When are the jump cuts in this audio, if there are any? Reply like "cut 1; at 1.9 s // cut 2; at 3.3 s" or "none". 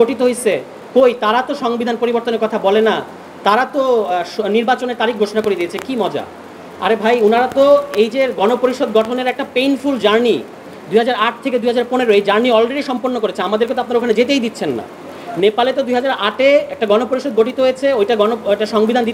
none